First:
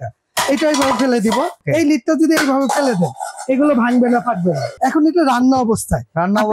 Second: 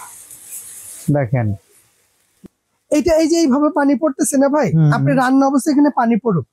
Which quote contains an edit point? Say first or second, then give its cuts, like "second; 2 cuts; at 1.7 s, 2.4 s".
first; 2 cuts; at 1.6 s, 4.7 s